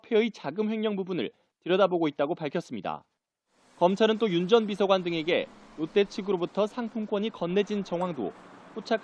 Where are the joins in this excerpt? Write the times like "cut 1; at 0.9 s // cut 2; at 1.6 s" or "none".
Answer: none